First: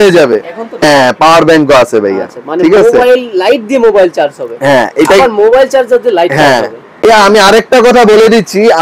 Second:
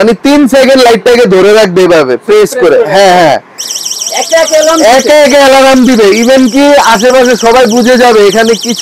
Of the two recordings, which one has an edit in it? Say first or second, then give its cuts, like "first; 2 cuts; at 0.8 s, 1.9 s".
first; 2 cuts; at 0.8 s, 7.0 s